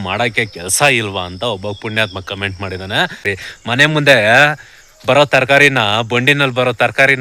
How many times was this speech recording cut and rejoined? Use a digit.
1